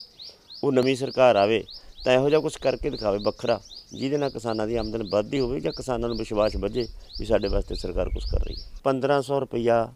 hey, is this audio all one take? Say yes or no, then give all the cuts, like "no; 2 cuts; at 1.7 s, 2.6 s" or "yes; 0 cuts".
no; 1 cut; at 8.8 s